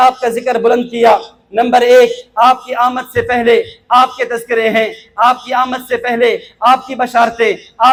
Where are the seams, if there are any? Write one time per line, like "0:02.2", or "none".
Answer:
none